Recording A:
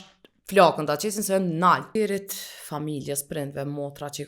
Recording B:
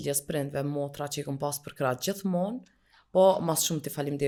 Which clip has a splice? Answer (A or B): A